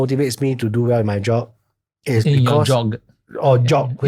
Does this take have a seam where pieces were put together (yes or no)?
no